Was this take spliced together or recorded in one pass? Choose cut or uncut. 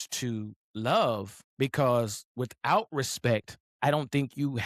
cut